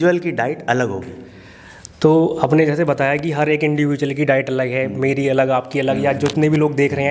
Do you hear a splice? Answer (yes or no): no